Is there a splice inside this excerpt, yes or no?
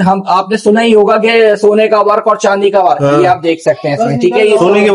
no